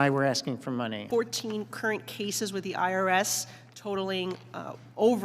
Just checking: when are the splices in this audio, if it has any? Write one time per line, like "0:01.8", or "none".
0:01.0